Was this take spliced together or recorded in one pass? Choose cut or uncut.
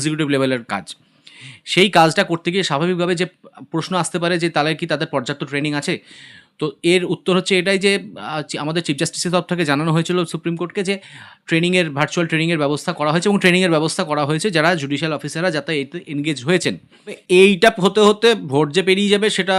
cut